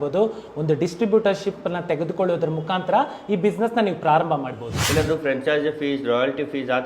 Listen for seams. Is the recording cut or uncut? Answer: cut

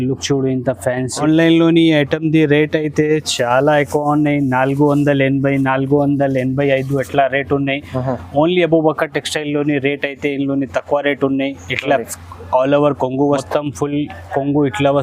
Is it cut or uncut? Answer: cut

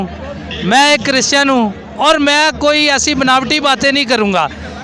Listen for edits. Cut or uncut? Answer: uncut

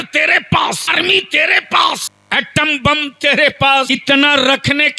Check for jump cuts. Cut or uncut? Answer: cut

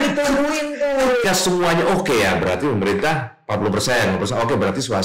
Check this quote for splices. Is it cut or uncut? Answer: cut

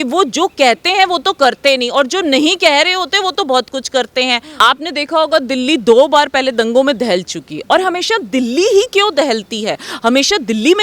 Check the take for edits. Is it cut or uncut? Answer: cut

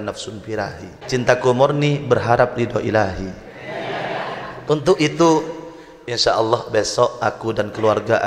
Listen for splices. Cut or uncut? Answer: cut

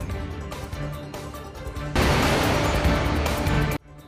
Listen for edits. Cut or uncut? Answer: uncut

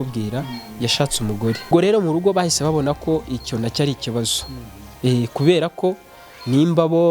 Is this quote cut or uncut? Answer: cut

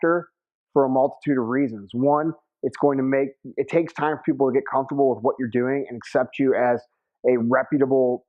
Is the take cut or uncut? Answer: cut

